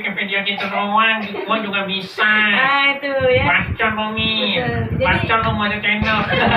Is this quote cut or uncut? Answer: uncut